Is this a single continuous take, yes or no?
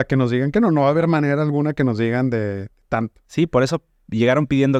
yes